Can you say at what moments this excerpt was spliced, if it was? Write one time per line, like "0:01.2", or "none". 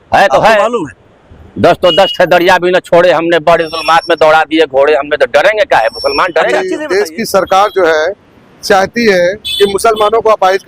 0:06.7